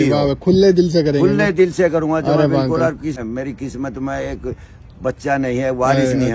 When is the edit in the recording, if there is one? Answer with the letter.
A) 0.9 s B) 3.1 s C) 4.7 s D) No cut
B